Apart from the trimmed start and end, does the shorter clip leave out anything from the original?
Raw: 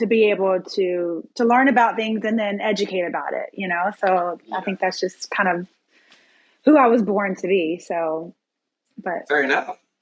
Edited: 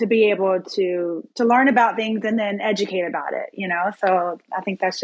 no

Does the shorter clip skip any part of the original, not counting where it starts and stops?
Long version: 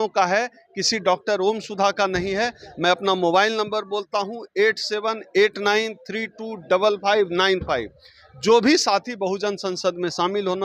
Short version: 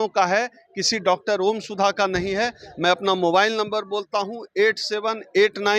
no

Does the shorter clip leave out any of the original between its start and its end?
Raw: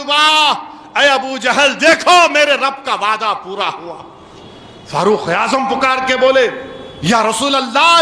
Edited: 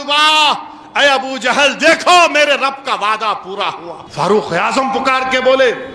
yes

